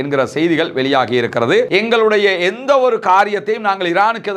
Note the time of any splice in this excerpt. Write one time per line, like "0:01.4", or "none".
0:01.7